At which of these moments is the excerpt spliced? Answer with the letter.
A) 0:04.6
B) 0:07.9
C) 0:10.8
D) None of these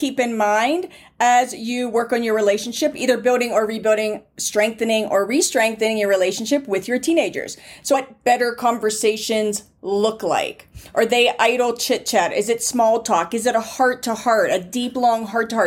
B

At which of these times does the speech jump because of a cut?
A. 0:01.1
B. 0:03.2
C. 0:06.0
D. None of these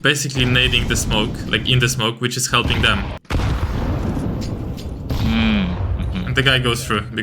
B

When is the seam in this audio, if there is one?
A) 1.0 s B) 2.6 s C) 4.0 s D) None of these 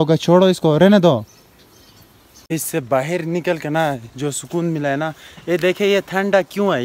D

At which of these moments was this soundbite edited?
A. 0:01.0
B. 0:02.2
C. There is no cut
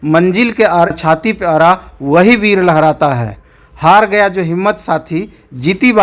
A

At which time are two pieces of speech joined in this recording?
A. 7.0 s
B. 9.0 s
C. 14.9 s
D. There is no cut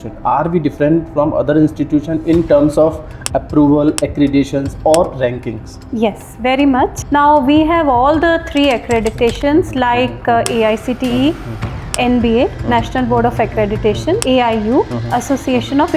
A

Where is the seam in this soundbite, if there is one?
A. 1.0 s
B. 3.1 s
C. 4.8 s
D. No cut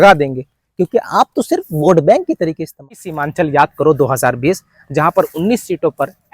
B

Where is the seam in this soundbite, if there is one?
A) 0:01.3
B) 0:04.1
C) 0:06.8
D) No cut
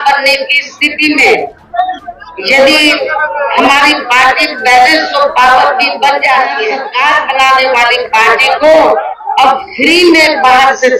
C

